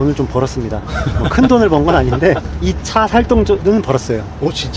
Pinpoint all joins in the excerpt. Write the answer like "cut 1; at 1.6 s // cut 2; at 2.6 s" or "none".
cut 1; at 2.6 s // cut 2; at 3.6 s